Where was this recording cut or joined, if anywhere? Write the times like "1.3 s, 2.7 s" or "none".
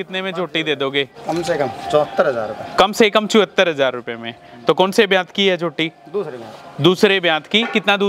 1.2 s